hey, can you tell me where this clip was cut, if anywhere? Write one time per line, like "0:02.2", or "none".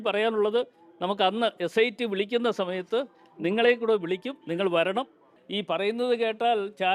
0:05.4